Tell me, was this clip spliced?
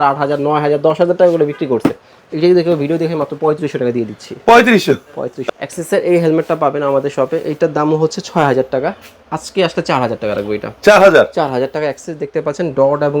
yes; 1 cut; at 5.3 s

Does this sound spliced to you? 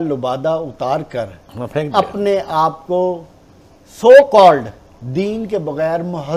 no; 0 cuts

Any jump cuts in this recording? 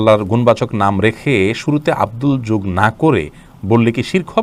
no; 0 cuts

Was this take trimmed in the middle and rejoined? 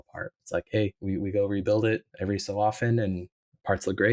no; 0 cuts

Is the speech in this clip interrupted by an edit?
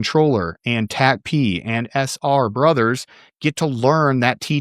no; 0 cuts

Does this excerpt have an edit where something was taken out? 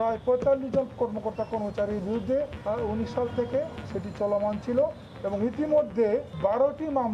yes; 3 cuts; at 2.6 s, 3.9 s, 6.3 s

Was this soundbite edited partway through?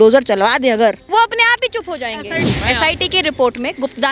yes; 2 cuts; at 1.0 s, 2.4 s

